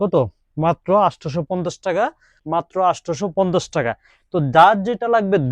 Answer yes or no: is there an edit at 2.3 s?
yes